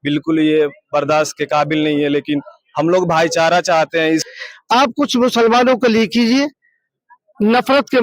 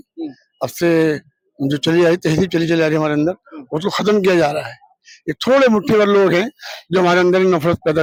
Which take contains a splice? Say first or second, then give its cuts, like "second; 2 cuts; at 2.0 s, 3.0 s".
first; 1 cut; at 4.3 s